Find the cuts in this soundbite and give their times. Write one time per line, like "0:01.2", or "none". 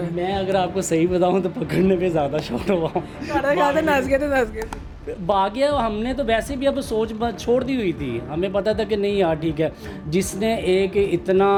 none